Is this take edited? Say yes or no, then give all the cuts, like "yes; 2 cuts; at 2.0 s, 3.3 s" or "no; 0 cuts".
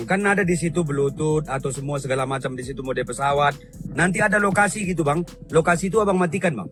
no; 0 cuts